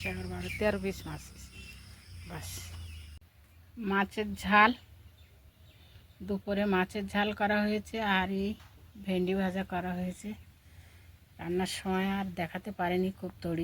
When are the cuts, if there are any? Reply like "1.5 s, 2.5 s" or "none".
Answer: 3.0 s